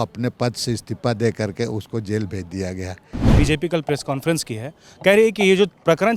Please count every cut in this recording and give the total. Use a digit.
1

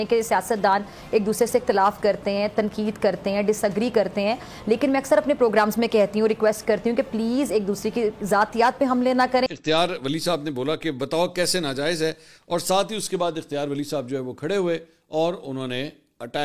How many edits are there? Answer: 1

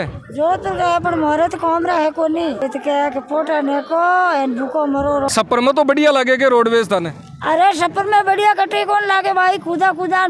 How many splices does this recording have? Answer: 2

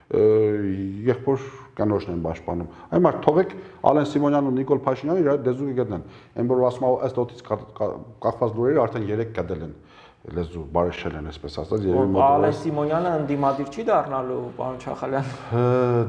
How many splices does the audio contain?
0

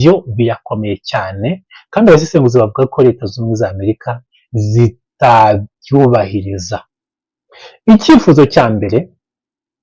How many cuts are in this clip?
0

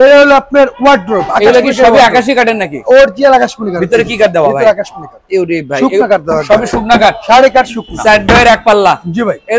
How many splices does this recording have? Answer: 0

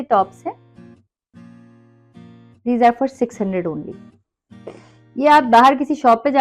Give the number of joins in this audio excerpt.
0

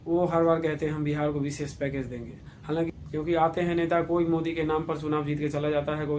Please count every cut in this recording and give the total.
1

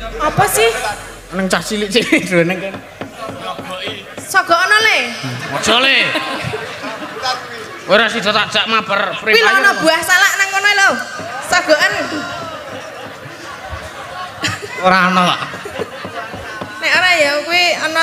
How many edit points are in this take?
0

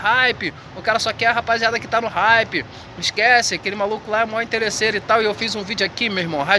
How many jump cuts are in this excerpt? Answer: 0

